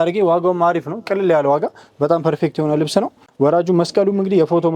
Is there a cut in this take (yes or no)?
yes